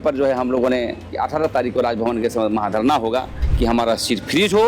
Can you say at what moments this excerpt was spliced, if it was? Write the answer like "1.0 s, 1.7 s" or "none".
1.1 s, 3.4 s